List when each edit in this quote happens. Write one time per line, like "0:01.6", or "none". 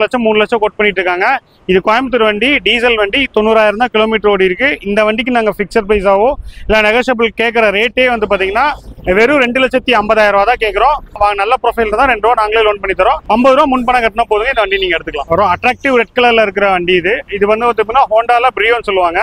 none